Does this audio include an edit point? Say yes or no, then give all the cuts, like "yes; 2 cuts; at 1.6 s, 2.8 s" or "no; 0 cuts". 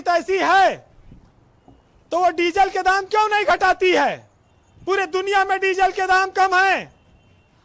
no; 0 cuts